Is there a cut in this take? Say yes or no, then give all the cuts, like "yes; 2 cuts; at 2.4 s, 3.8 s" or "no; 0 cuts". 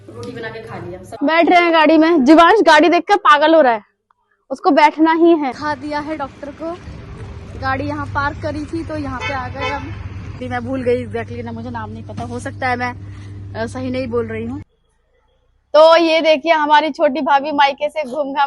yes; 4 cuts; at 1.1 s, 5.6 s, 10.4 s, 14.7 s